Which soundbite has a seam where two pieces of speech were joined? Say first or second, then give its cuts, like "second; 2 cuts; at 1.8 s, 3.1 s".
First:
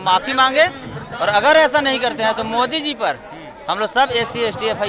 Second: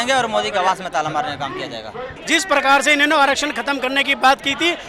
second; 1 cut; at 2.1 s